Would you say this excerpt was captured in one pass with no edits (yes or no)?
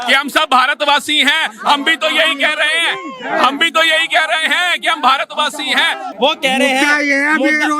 no